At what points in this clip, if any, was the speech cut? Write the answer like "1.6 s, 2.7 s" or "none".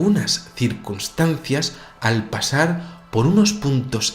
3.0 s